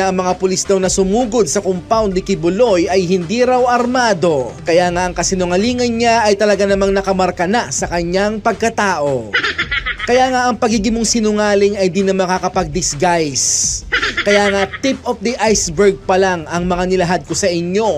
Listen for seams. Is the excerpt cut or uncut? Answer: cut